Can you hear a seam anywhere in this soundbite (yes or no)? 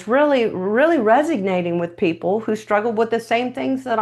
no